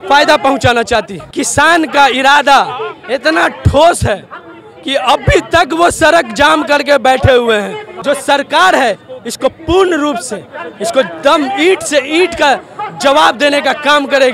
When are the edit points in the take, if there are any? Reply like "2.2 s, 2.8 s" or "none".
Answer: 1.2 s, 7.9 s